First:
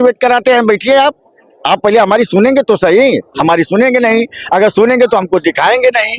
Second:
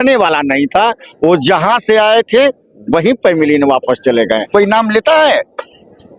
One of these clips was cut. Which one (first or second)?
second